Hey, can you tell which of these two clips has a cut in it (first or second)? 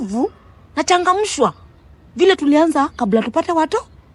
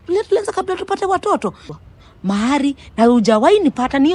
second